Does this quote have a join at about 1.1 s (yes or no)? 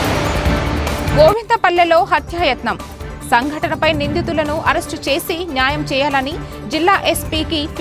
yes